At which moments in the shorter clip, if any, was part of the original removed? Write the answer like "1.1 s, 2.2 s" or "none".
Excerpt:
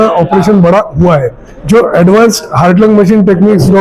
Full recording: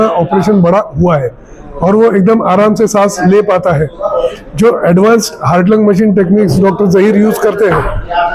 1.5 s